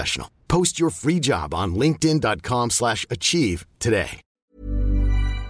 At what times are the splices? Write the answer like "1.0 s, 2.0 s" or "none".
4.5 s